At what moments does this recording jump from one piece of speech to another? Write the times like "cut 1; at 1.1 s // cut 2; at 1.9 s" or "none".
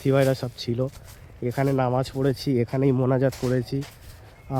none